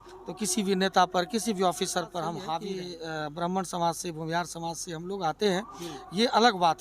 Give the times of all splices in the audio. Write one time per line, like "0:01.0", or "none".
0:02.6